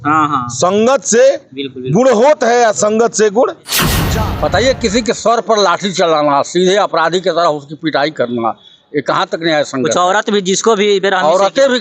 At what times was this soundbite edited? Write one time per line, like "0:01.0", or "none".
0:03.9